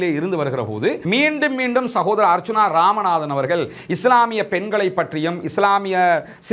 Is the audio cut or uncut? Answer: cut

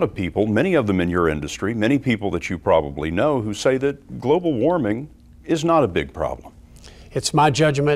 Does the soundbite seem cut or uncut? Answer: uncut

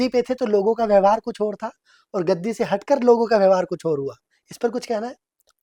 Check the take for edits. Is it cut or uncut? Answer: uncut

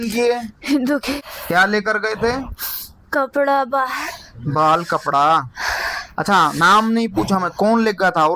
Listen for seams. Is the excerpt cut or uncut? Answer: cut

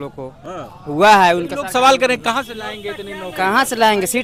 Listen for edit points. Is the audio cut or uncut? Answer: uncut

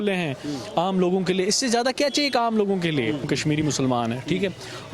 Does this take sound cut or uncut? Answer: cut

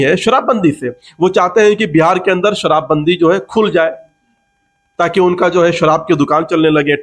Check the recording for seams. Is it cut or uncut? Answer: uncut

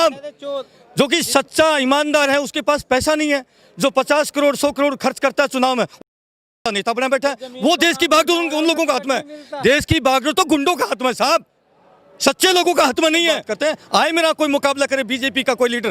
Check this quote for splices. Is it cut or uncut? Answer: cut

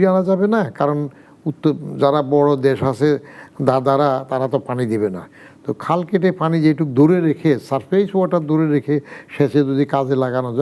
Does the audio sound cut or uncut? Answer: uncut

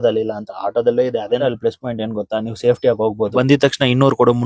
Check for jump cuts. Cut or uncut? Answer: cut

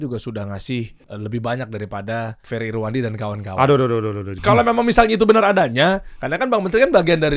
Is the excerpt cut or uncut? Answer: cut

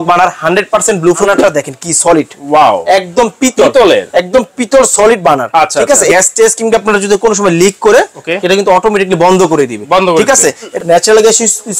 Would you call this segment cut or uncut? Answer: cut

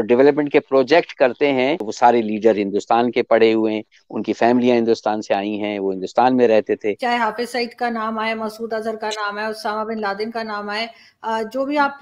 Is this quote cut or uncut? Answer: cut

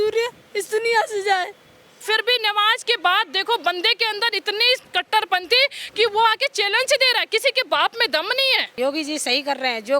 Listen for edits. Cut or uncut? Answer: cut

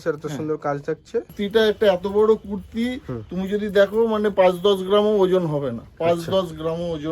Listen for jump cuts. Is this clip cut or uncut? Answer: cut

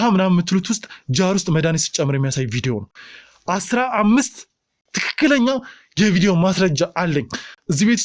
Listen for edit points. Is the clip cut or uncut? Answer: uncut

